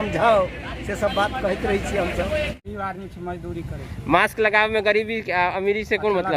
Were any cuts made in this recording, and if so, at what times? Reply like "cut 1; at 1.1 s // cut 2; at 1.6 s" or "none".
cut 1; at 2.6 s